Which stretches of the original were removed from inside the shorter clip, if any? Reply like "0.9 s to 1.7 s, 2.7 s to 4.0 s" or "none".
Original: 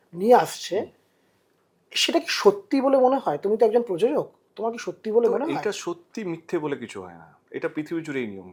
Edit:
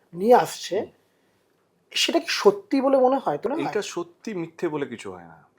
3.5 s to 5.4 s